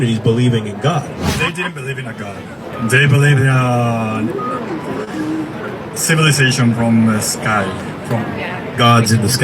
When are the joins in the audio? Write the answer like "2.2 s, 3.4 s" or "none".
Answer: 1.3 s